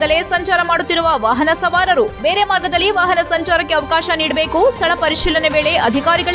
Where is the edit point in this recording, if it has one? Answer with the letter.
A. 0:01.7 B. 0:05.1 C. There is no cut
C